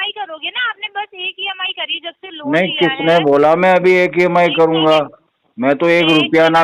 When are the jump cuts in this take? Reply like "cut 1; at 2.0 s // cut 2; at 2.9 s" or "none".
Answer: none